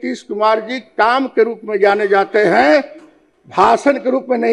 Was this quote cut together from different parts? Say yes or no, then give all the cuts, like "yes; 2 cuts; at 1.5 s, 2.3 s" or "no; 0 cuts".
no; 0 cuts